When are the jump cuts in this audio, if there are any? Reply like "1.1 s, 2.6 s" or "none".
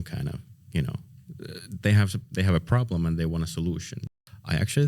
4.0 s